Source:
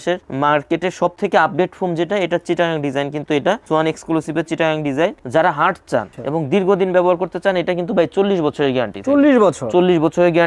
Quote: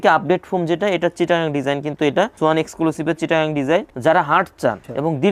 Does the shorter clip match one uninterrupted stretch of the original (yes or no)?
yes